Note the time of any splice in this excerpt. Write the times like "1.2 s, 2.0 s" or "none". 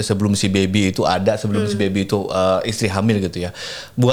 none